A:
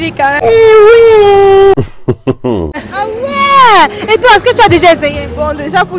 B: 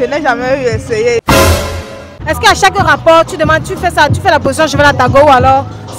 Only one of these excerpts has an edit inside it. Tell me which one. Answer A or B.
B